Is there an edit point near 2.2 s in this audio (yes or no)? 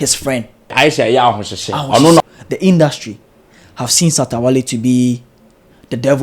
yes